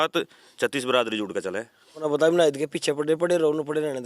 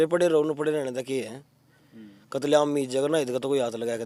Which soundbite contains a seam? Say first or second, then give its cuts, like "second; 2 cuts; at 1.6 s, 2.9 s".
first; 1 cut; at 2.0 s